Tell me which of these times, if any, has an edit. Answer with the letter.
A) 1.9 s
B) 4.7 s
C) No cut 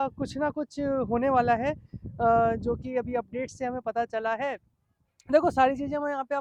C